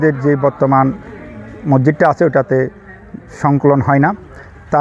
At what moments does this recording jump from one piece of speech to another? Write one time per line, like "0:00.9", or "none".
none